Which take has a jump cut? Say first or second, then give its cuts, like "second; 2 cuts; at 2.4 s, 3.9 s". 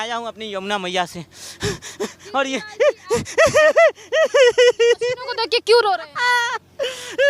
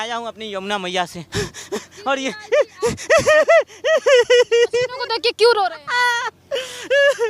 second; 1 cut; at 1.2 s